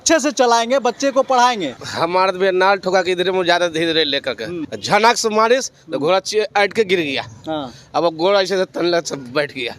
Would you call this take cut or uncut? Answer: cut